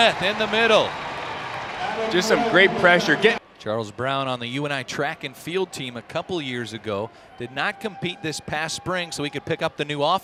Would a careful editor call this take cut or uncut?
uncut